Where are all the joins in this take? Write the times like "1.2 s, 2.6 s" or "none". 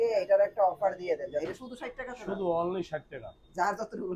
1.5 s